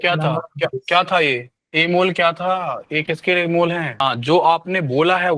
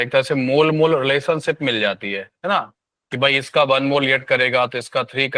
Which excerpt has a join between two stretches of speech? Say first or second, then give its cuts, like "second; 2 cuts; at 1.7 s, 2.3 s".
first; 2 cuts; at 1.6 s, 4.0 s